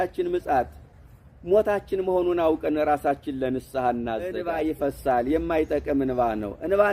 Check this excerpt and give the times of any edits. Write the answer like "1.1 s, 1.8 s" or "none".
4.4 s

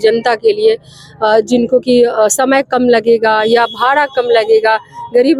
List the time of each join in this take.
none

